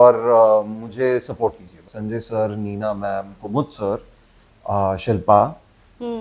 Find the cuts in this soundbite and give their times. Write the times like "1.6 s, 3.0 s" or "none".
1.9 s